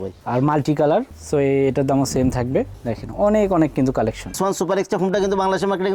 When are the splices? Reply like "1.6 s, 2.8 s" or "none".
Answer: 1.1 s, 4.4 s

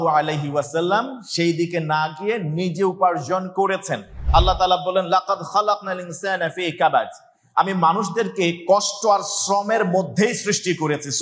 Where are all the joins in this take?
4.2 s

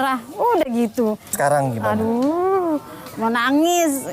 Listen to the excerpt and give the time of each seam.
1.3 s

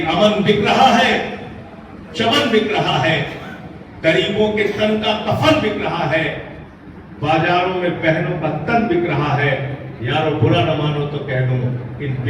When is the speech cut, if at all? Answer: none

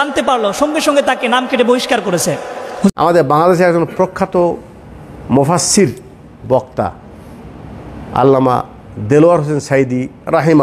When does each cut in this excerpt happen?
2.9 s

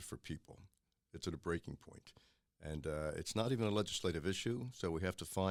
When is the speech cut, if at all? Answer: none

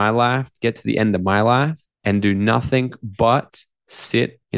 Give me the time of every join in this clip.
1.9 s

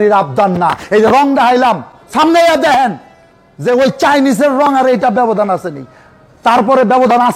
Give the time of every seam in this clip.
none

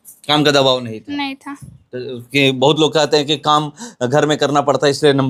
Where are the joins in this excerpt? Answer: none

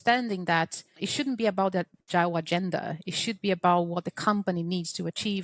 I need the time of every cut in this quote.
1.0 s, 2.0 s

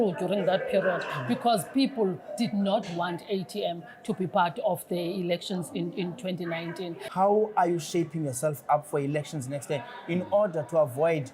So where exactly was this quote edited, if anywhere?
7.0 s

